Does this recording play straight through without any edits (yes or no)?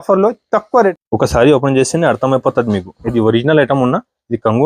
no